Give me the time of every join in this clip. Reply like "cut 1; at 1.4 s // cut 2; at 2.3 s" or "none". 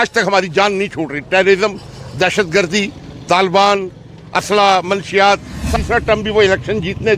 cut 1; at 5.7 s